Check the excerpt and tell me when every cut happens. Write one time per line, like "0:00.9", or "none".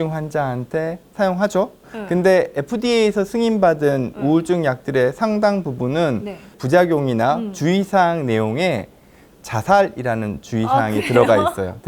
0:01.9
0:06.6